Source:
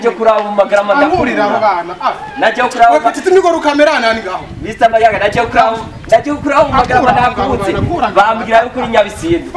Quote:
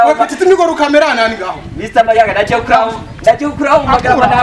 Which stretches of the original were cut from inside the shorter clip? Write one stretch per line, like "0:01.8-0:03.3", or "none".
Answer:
none